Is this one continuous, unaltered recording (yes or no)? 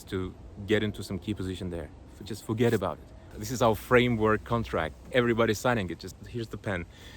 no